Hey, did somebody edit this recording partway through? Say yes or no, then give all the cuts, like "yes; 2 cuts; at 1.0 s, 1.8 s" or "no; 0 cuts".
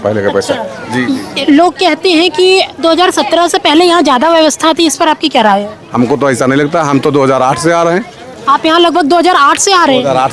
no; 0 cuts